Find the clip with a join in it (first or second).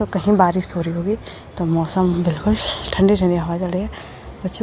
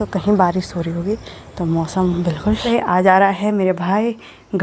second